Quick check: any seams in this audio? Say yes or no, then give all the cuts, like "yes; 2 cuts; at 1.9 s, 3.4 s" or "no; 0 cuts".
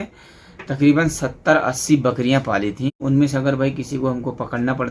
yes; 1 cut; at 3.0 s